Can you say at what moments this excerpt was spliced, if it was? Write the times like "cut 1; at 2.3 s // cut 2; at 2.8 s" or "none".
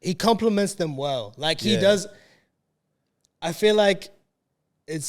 none